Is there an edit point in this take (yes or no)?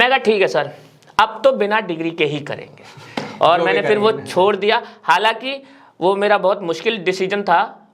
no